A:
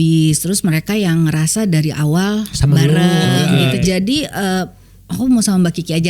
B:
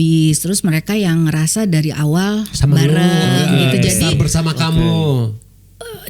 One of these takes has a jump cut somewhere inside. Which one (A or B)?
A